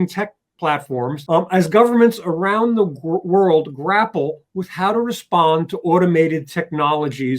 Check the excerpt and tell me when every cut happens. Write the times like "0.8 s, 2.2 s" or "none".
1.2 s